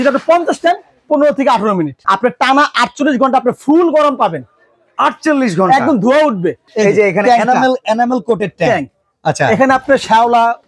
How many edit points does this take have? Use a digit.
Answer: 2